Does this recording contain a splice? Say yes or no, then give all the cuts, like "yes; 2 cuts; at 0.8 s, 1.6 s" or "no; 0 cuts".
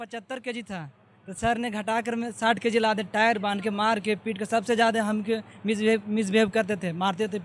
no; 0 cuts